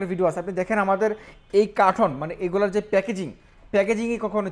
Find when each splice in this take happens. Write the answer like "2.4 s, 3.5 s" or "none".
none